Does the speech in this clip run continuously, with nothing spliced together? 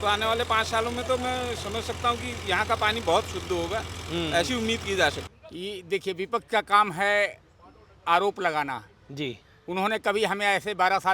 no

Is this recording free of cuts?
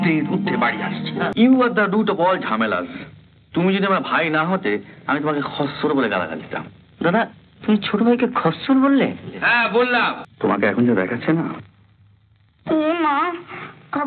no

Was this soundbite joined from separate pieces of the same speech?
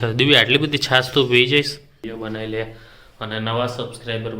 yes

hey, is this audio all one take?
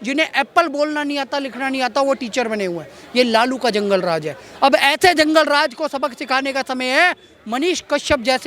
yes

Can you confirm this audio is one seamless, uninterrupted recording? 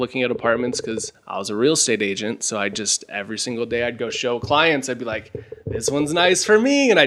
yes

